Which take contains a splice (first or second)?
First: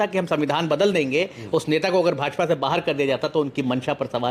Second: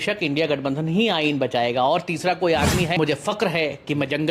second